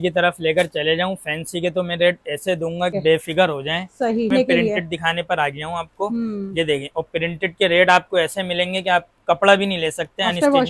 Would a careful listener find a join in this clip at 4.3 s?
yes; 2 cuts; at 2.9 s, 4.3 s

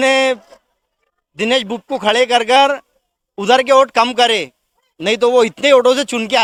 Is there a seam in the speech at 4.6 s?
no; 0 cuts

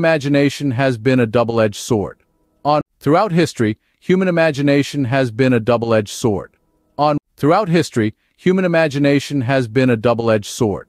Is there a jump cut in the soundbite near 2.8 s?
yes; 2 cuts; at 2.8 s, 7.2 s

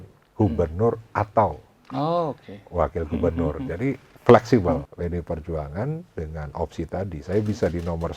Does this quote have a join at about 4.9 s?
yes; 1 cut; at 4.9 s

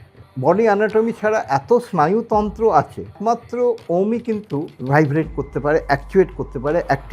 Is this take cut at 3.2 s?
yes; 2 cuts; at 3.2 s, 4.7 s

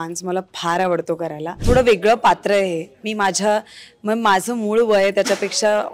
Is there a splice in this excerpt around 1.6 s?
yes; 1 cut; at 1.6 s

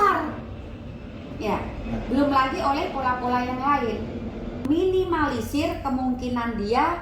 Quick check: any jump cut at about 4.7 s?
yes; 1 cut; at 4.7 s

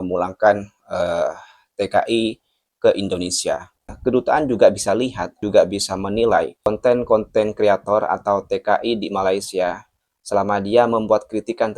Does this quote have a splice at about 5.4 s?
yes; 3 cuts; at 3.9 s, 5.4 s, 6.7 s

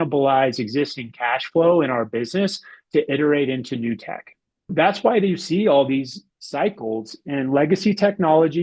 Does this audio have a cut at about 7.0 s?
no; 1 cut; at 4.7 s

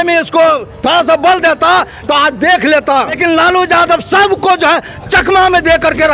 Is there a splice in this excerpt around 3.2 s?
yes; 1 cut; at 3.2 s

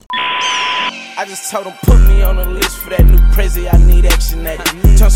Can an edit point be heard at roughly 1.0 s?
yes; 1 cut; at 1.0 s

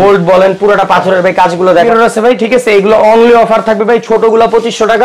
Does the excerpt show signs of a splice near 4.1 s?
no; 1 cut; at 1.9 s

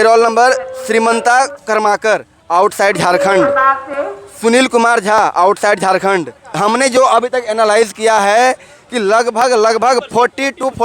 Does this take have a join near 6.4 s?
yes; 1 cut; at 6.4 s

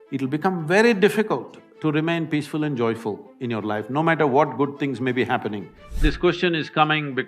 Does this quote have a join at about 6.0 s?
yes; 1 cut; at 6.0 s

